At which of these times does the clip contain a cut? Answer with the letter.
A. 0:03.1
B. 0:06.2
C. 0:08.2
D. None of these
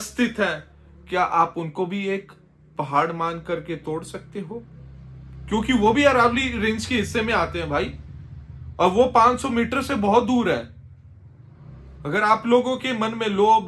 D